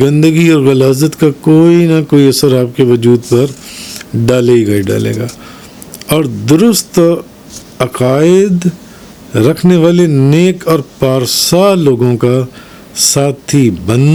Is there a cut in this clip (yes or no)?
no